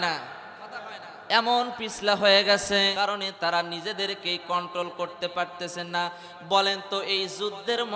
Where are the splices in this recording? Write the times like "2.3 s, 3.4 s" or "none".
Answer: 2.9 s